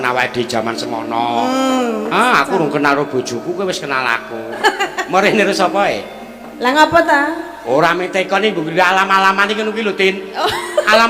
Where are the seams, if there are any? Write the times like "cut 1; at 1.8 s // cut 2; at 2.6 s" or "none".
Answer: cut 1; at 4.6 s